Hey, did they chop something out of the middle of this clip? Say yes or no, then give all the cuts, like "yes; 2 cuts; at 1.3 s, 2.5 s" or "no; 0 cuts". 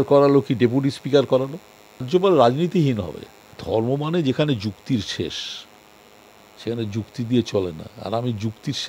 yes; 2 cuts; at 2.1 s, 3.6 s